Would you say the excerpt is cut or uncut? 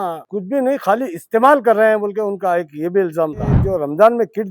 cut